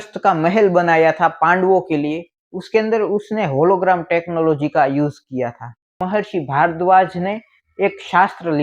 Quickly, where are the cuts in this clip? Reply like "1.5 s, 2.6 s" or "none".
6.0 s